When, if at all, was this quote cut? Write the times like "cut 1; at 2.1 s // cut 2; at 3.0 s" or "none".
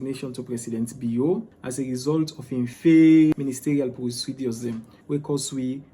cut 1; at 1.6 s // cut 2; at 2.7 s // cut 3; at 3.3 s // cut 4; at 4.9 s

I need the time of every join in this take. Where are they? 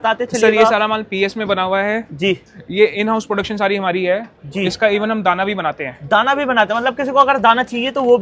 none

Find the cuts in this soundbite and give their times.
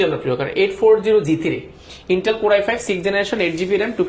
none

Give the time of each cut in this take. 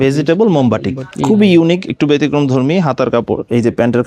cut 1; at 1.0 s

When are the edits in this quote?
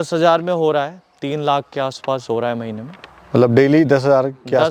none

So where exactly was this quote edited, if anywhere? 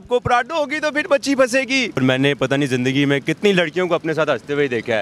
cut 1; at 2.0 s

